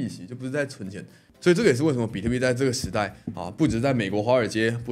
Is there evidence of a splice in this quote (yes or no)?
no